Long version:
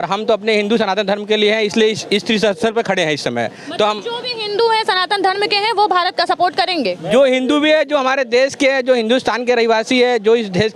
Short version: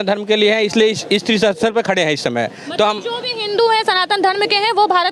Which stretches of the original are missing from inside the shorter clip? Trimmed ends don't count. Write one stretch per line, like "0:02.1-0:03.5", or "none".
none